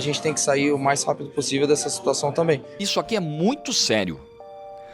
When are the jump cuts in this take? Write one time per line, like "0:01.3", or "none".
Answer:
0:02.8